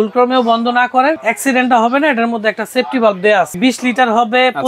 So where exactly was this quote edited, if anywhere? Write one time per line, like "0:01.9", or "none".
0:01.2
0:03.5